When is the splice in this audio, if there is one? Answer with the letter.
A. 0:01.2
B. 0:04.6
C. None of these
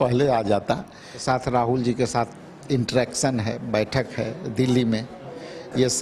A